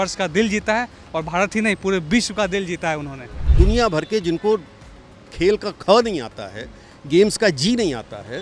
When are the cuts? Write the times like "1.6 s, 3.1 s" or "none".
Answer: 3.4 s